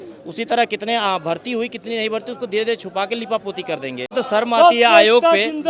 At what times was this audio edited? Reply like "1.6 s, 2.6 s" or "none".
4.1 s